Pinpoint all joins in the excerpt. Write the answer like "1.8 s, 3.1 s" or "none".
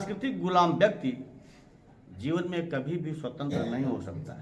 none

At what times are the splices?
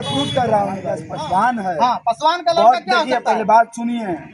1.1 s

